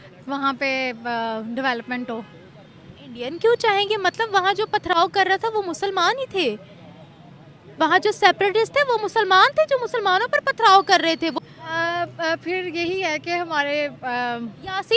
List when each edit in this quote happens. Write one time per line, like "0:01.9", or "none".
none